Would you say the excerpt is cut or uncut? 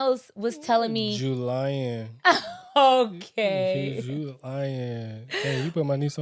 uncut